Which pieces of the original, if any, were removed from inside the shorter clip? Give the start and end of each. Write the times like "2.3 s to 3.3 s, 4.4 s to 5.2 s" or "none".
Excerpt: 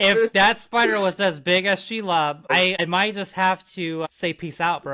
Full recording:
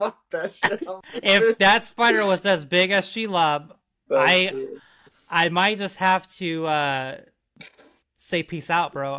4.1 s to 5.4 s, 6.7 s to 8.1 s